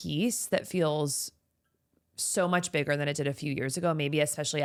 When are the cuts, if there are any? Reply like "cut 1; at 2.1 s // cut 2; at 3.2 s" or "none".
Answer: none